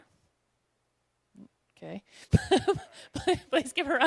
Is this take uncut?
no; 1 cut; at 1.7 s

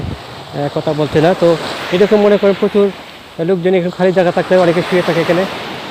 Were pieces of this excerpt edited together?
no; 0 cuts

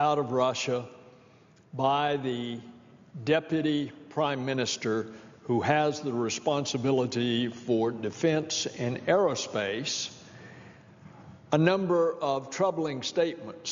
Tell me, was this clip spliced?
yes; 1 cut; at 1.8 s

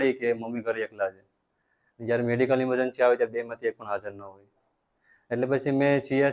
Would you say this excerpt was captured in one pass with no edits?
yes; 0 cuts

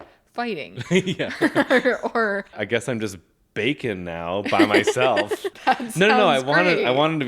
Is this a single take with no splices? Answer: no; 2 cuts; at 2.6 s, 5.5 s

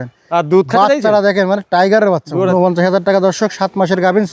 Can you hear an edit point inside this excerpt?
yes; 1 cut; at 2.5 s

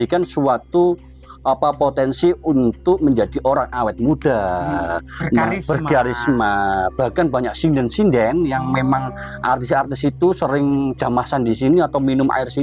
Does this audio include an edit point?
no; 0 cuts

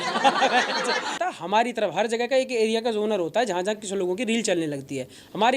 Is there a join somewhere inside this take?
yes; 1 cut; at 1.2 s

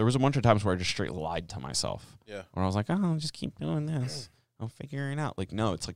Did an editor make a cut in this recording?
no; 0 cuts

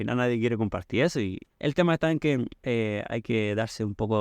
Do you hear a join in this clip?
yes; 2 cuts; at 1.4 s, 2.6 s

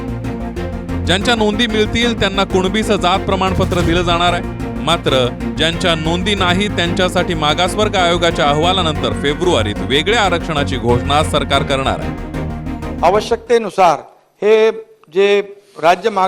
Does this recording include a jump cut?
no; 0 cuts

